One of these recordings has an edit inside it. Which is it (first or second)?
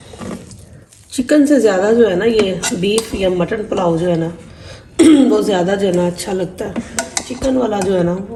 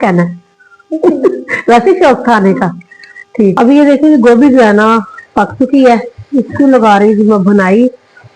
second